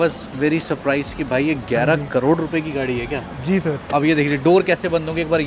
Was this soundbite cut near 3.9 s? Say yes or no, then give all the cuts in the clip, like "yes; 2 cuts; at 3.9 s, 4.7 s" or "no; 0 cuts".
yes; 1 cut; at 3.9 s